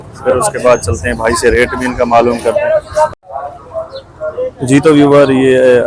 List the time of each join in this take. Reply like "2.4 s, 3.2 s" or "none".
3.2 s